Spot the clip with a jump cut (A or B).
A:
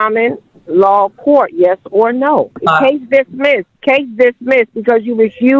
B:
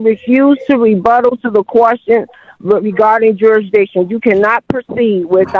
A